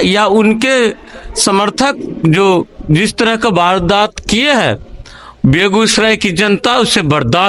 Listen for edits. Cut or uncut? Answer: uncut